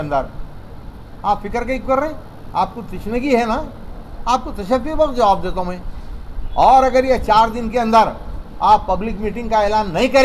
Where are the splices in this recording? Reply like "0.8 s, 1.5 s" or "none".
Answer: none